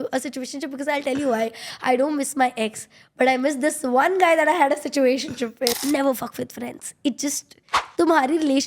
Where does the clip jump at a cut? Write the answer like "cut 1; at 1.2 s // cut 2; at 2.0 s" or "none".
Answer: cut 1; at 5.7 s